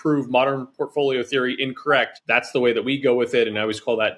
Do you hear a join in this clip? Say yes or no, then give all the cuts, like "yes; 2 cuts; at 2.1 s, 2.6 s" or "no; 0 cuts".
yes; 1 cut; at 2.2 s